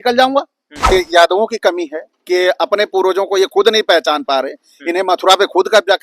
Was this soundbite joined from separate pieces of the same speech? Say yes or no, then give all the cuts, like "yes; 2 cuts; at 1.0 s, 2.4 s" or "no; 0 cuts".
yes; 1 cut; at 0.9 s